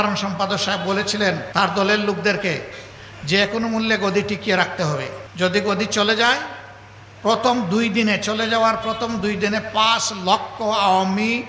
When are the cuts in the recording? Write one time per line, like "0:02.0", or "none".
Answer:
0:01.4
0:05.2